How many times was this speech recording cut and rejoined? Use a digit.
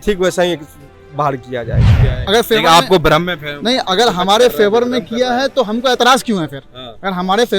1